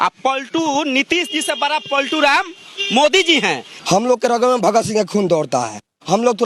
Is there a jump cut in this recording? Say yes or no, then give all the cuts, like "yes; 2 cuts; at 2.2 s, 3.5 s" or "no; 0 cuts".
yes; 1 cut; at 3.7 s